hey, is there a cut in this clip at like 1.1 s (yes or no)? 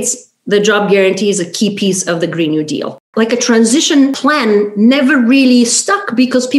no